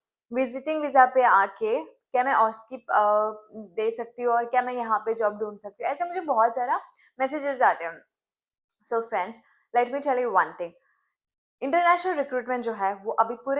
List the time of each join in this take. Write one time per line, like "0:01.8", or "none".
none